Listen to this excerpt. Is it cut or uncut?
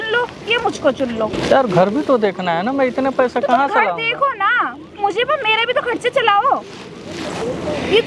uncut